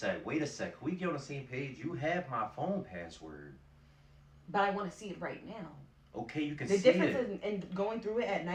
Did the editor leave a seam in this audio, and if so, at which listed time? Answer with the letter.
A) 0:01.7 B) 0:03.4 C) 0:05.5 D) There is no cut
D